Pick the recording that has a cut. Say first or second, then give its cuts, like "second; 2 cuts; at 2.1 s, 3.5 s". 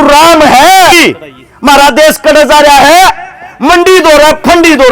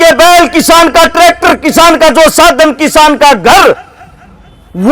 first; 1 cut; at 0.9 s